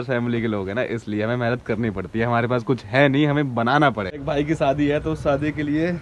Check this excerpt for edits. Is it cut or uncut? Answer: cut